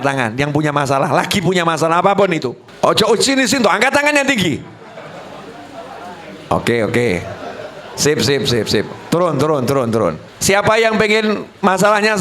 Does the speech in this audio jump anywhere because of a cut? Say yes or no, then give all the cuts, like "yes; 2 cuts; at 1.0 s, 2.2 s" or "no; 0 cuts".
yes; 2 cuts; at 2.6 s, 10.3 s